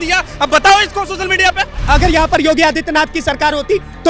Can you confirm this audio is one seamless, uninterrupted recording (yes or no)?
no